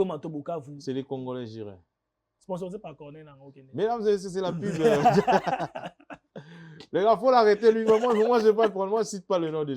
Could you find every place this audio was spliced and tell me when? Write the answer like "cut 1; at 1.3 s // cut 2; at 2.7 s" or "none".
cut 1; at 2.3 s